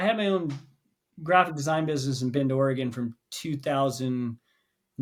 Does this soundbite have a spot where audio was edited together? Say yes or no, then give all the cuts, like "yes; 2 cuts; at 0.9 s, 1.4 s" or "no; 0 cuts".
no; 0 cuts